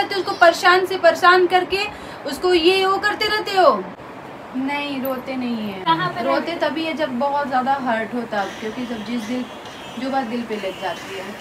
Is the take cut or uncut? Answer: cut